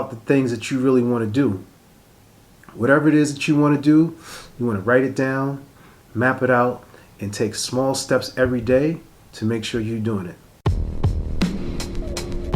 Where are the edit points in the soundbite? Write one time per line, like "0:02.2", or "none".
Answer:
0:10.4

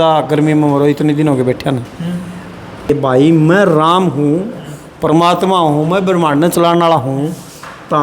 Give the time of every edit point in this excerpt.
0:02.9

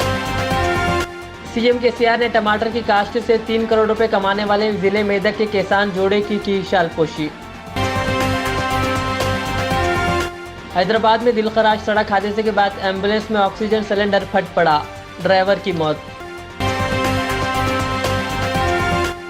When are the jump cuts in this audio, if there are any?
0:01.0

